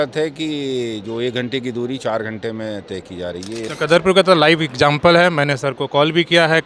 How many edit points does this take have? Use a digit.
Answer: 1